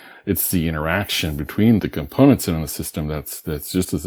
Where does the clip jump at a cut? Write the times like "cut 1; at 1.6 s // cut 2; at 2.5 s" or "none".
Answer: cut 1; at 1.9 s